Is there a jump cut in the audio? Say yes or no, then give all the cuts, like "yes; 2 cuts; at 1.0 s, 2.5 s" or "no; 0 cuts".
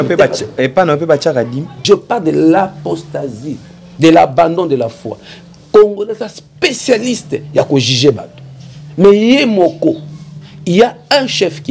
yes; 1 cut; at 1.8 s